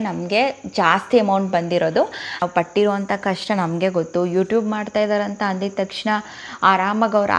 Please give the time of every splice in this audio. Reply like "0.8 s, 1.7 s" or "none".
2.4 s